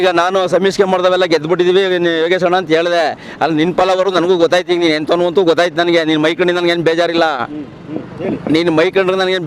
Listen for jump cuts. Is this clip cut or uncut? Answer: uncut